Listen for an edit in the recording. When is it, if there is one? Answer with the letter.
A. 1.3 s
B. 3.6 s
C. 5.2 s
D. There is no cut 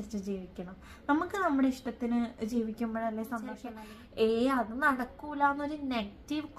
B